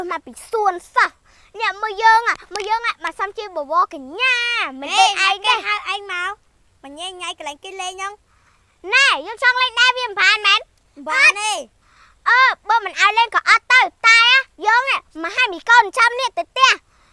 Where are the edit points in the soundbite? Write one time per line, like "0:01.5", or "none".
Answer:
none